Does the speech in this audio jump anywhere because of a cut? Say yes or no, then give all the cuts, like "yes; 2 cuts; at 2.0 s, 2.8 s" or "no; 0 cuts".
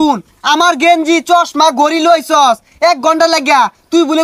no; 0 cuts